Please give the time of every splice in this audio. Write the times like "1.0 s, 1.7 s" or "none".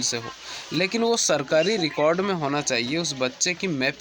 none